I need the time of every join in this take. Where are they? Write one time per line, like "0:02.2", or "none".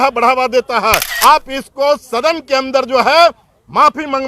0:01.1